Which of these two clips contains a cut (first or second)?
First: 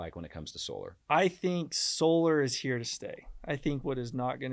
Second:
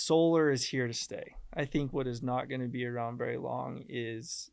first